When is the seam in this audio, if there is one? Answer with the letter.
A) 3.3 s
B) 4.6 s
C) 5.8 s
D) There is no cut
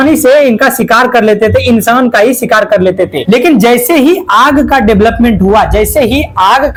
D